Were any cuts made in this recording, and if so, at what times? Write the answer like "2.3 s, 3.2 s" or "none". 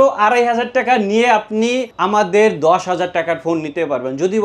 1.9 s

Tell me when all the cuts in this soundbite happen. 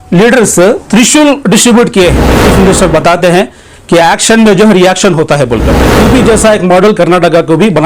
2.5 s, 6.0 s

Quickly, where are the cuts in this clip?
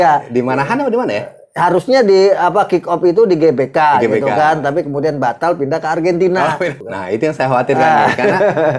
6.8 s

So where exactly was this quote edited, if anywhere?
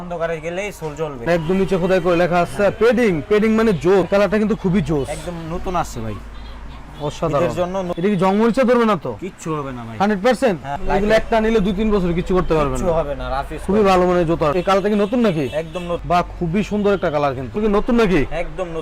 1.2 s, 4.0 s, 7.9 s, 10.7 s, 14.5 s, 17.6 s

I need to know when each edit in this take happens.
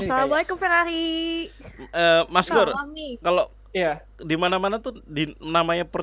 none

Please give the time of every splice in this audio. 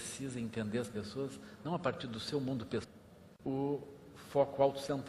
none

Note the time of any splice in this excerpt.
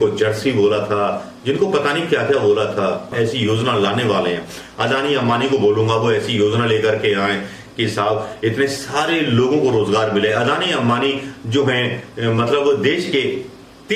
3.1 s

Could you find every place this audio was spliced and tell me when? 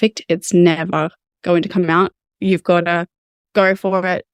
none

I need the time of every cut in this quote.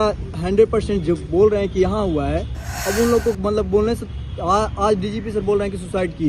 none

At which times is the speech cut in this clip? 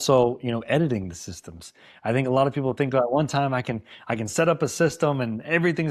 none

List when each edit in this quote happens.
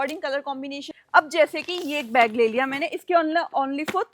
0.9 s

